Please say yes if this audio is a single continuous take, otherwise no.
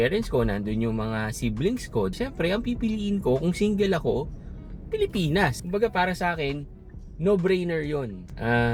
yes